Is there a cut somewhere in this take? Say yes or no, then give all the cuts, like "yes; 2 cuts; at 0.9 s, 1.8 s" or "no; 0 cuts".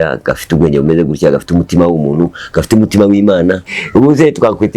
yes; 1 cut; at 3.7 s